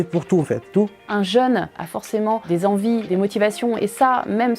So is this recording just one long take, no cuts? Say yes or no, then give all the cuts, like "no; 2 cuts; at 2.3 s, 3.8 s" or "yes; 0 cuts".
no; 2 cuts; at 0.9 s, 1.8 s